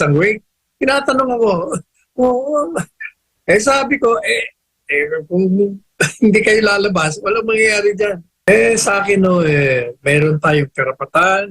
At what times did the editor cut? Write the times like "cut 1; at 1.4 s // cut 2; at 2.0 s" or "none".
cut 1; at 8.5 s